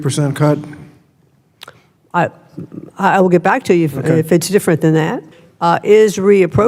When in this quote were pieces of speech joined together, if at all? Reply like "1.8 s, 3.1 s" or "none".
5.3 s